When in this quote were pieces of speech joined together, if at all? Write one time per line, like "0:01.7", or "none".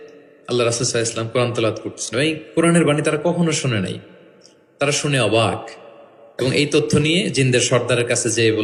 none